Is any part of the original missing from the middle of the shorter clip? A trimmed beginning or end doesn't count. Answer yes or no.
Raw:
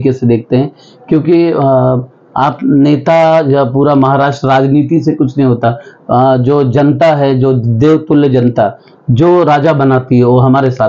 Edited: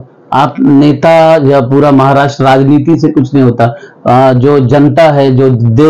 no